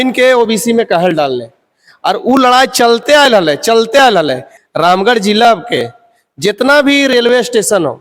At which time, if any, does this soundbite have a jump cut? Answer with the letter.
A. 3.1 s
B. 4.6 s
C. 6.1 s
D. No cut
B